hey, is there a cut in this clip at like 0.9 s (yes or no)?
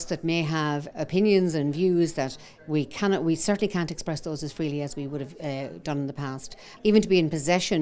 yes